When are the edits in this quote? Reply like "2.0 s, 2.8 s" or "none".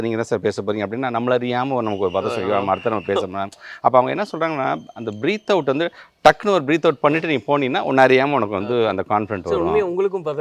none

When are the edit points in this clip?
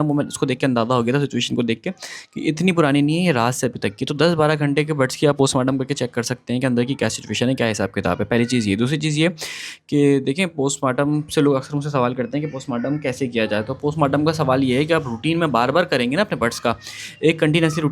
none

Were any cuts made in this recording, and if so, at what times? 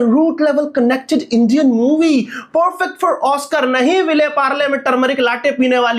none

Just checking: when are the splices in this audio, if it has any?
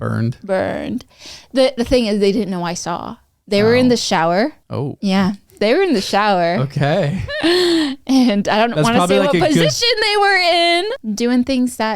10.9 s

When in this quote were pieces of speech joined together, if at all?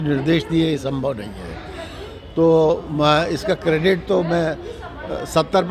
none

